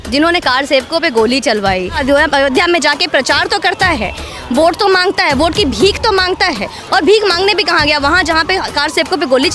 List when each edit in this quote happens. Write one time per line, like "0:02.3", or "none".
0:02.0